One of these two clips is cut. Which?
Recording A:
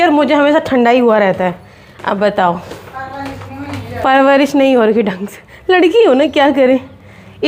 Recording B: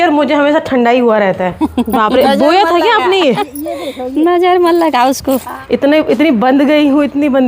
B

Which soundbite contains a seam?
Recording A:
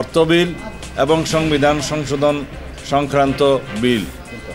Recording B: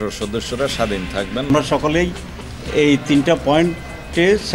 B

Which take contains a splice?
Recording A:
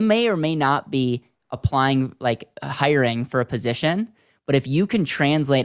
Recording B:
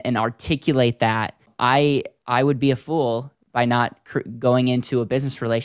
B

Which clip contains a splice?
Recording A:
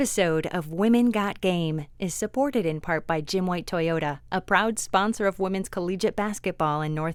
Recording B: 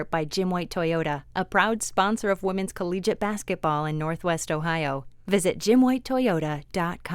B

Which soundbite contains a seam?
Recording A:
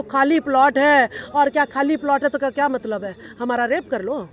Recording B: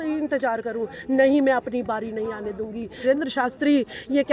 B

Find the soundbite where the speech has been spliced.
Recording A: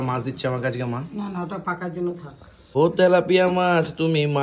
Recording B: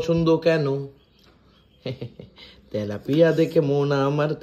A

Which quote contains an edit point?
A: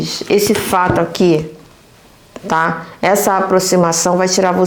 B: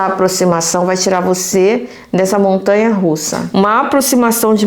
B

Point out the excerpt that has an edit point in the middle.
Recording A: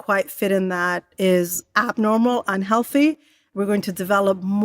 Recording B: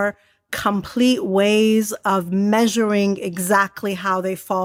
A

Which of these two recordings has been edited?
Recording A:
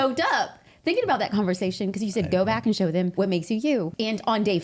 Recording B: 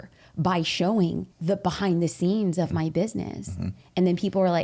A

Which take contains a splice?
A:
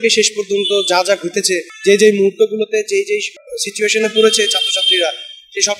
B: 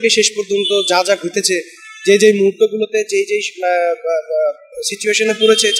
A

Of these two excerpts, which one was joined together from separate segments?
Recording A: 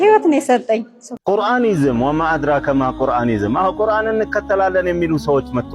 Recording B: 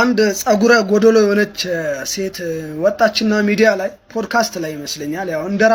A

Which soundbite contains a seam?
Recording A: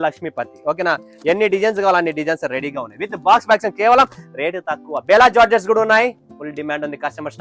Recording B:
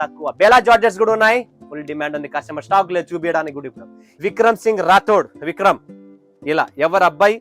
B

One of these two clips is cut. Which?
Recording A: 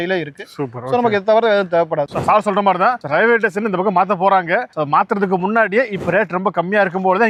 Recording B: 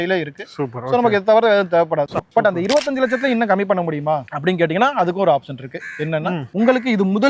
B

